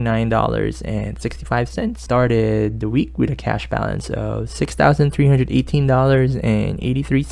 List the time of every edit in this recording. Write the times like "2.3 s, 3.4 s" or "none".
2.0 s